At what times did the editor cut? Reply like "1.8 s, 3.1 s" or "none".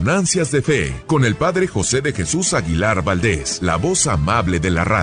0.9 s, 3.5 s